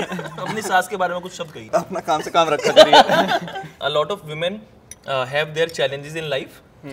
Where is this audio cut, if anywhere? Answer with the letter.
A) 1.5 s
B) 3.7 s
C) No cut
B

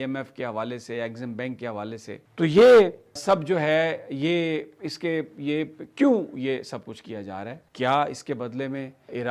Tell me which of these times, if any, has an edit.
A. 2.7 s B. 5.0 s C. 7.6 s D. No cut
D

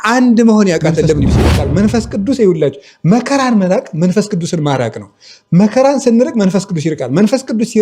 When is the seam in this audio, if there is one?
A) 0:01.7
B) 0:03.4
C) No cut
A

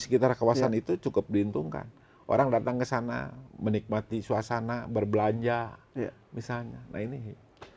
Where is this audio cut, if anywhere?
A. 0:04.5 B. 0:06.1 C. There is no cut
C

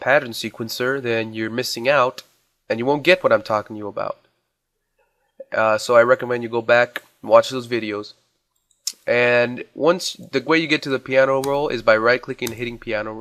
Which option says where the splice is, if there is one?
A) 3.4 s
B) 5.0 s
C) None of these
A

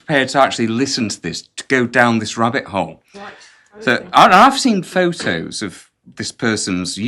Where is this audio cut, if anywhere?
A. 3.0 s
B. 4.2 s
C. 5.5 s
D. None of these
D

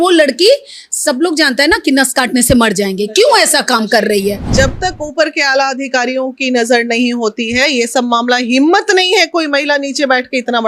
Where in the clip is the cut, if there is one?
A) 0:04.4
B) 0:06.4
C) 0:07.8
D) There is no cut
A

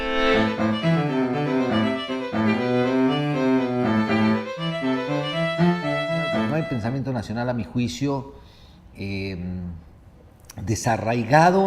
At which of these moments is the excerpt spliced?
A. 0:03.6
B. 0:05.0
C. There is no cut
A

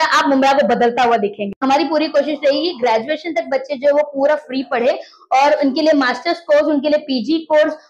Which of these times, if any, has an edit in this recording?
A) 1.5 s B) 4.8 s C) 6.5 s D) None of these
A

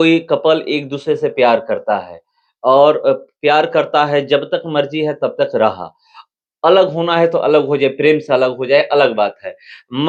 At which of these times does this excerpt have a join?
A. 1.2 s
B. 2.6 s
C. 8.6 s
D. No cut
D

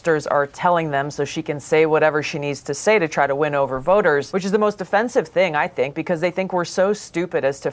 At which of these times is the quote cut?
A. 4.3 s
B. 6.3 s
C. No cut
A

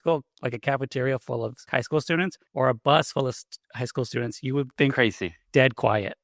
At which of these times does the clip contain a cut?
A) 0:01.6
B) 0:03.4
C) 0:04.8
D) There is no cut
A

